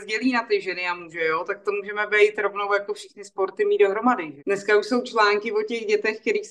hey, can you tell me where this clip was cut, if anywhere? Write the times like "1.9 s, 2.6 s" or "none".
4.3 s